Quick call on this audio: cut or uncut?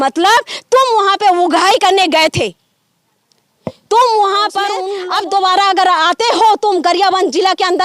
cut